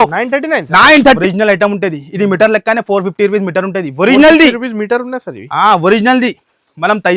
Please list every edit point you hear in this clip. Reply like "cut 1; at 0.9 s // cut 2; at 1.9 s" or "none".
cut 1; at 1.2 s

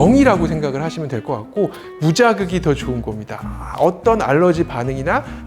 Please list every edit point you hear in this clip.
cut 1; at 2.0 s

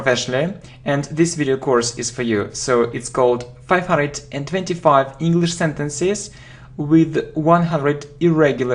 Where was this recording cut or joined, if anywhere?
none

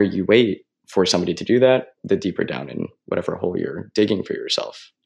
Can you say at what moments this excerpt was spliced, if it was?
none

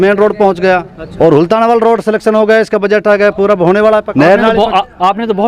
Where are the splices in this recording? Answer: cut 1; at 1.0 s // cut 2; at 4.1 s

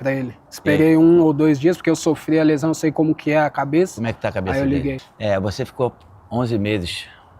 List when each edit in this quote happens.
cut 1; at 5.1 s

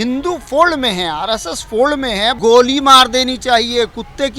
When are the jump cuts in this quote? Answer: cut 1; at 2.4 s

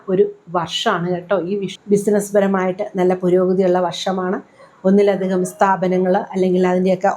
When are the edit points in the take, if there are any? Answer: cut 1; at 1.7 s

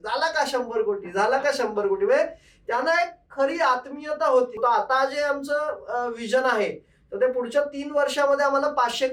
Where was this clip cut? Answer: cut 1; at 4.6 s

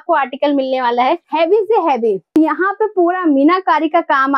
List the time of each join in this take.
cut 1; at 1.3 s // cut 2; at 2.3 s

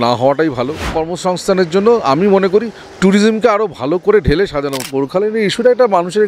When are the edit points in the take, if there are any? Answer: cut 1; at 1.0 s // cut 2; at 4.8 s

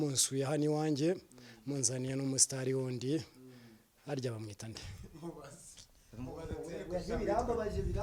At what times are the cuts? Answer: none

